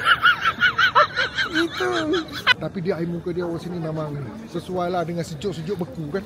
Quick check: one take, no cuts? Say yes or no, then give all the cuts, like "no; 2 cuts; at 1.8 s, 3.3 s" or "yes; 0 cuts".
no; 1 cut; at 2.5 s